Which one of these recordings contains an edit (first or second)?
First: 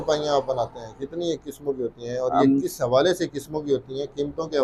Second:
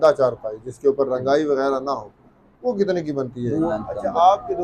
second